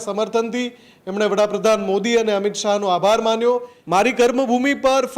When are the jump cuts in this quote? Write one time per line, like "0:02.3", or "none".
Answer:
0:03.7